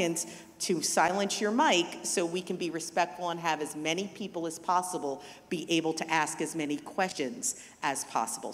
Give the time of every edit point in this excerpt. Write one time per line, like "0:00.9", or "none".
0:07.1